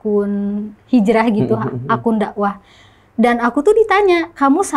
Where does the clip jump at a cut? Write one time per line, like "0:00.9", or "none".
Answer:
none